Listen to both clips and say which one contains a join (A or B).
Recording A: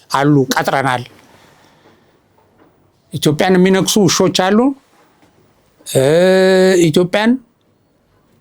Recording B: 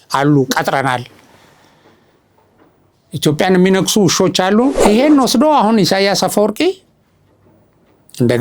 B